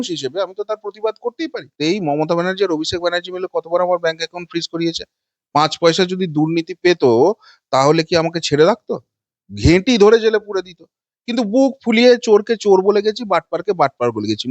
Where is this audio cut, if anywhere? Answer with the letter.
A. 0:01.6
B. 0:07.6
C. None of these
A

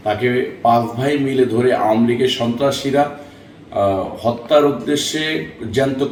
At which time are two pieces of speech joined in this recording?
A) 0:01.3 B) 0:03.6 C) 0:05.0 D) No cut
D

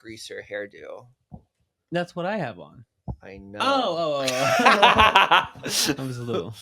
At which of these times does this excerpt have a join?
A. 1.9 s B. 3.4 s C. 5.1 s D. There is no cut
D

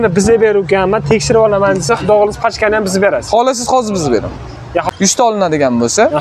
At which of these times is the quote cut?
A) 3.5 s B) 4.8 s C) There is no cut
B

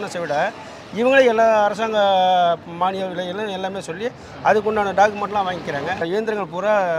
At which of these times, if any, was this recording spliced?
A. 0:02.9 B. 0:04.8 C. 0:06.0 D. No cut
C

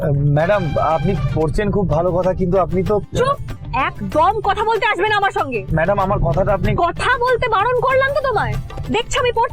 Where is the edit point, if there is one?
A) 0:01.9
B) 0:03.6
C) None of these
B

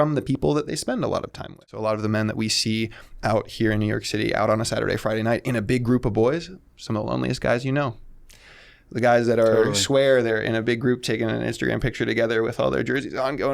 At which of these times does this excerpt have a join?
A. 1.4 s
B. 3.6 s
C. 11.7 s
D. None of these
A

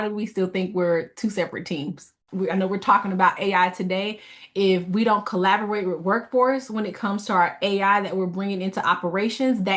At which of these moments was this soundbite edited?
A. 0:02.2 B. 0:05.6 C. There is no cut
A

